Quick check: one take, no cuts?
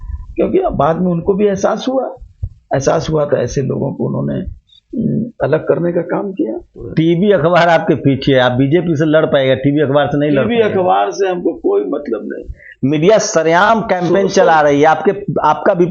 no; 2 cuts; at 6.8 s, 12.6 s

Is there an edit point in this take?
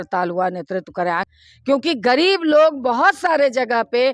yes; 1 cut; at 1.3 s

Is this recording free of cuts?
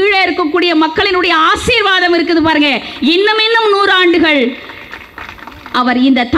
yes; 0 cuts

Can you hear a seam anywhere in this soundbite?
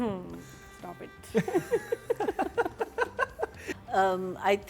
yes; 1 cut; at 3.7 s

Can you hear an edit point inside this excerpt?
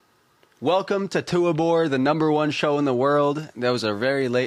no; 0 cuts

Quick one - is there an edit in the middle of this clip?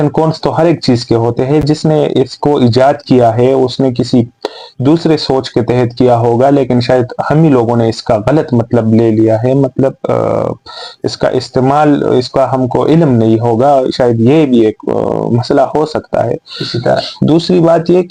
no; 0 cuts

